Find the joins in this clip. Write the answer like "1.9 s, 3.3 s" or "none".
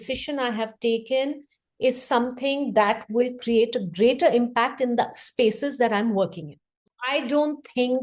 7.0 s